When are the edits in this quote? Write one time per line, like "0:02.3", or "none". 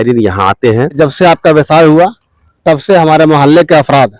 0:01.0